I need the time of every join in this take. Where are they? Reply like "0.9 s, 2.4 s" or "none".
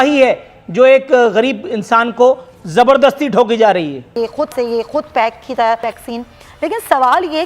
4.1 s, 5.9 s